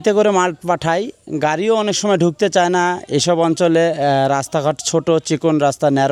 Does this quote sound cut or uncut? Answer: uncut